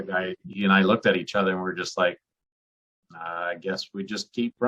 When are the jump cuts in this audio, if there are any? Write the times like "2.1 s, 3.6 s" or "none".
none

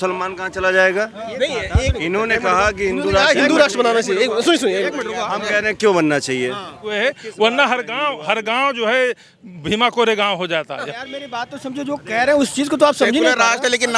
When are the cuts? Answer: 1.2 s, 6.9 s, 11.0 s

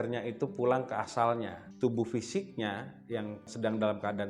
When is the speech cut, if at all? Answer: 1.6 s, 3.5 s

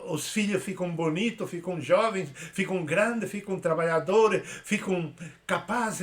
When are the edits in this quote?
none

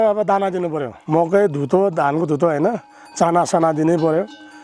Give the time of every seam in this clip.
1.0 s

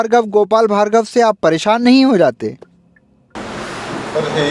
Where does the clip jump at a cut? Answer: 3.3 s

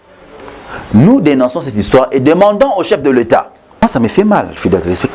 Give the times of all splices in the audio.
3.8 s

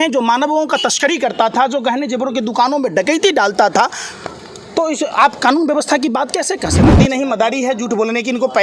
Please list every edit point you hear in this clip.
6.9 s

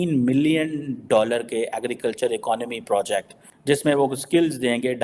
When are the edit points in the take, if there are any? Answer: none

